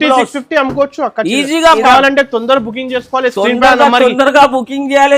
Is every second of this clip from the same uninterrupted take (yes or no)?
no